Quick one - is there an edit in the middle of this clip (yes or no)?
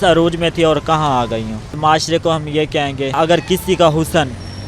yes